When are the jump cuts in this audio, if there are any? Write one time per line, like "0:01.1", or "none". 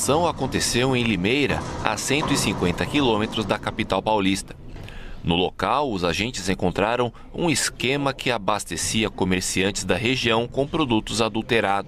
none